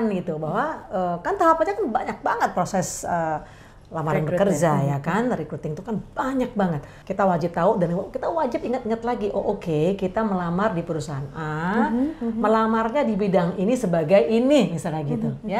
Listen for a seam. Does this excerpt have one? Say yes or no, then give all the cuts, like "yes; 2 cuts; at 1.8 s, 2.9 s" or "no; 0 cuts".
yes; 1 cut; at 6.9 s